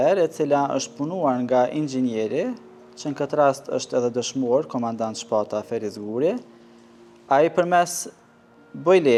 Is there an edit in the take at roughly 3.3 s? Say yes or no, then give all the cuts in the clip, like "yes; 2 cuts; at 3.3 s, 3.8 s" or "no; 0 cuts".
no; 0 cuts